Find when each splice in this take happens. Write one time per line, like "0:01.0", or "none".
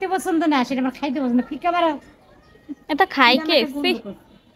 none